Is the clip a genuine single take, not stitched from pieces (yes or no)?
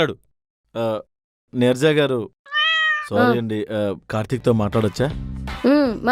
yes